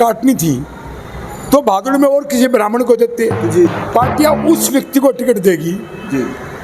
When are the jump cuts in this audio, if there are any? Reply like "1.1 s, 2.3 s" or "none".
3.7 s